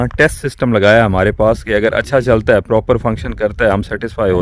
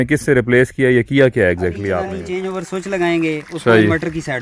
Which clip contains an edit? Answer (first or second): second